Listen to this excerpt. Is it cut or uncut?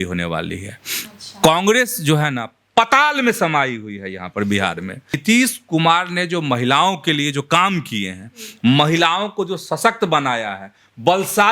cut